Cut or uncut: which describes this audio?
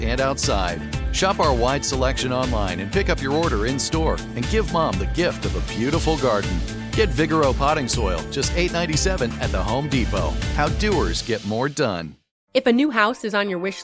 cut